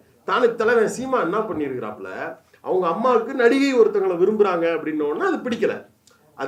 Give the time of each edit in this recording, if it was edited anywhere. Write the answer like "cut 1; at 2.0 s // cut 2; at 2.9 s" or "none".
none